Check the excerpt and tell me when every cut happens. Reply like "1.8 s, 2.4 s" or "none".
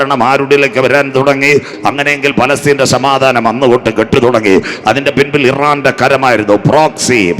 1.7 s